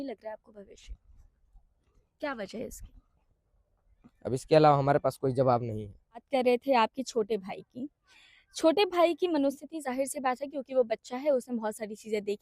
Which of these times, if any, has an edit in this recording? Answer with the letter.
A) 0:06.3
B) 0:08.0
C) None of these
A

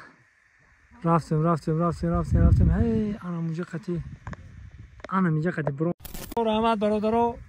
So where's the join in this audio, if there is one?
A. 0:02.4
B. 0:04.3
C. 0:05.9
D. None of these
C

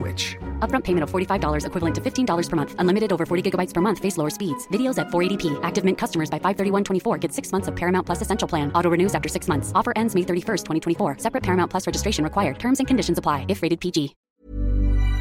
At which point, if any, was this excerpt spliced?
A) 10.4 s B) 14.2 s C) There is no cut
B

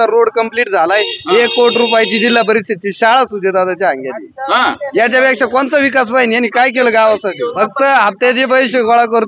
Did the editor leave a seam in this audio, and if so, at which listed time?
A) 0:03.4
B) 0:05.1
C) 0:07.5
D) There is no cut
C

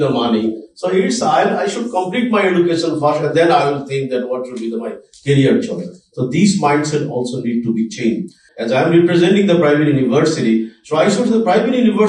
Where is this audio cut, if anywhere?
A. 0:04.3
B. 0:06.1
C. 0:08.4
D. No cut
C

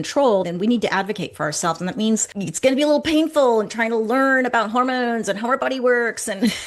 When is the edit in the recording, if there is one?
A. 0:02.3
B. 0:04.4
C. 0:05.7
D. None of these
A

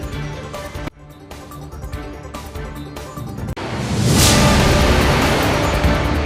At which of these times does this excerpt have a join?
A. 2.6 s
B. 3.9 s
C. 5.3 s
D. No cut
D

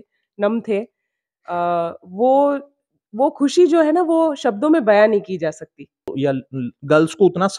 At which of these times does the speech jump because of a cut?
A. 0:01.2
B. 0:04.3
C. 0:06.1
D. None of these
C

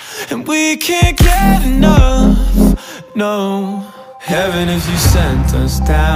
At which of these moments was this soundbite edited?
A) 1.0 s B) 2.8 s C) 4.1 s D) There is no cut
D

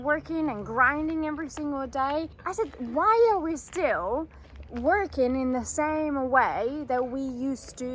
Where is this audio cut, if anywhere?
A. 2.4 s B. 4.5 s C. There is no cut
A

